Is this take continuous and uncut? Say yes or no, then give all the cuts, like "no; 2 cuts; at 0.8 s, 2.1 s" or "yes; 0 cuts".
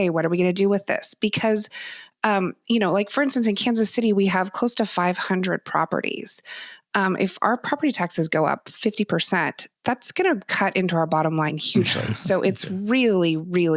yes; 0 cuts